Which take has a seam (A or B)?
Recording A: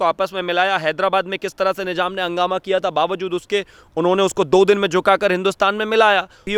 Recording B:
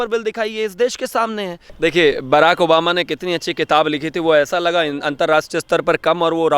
B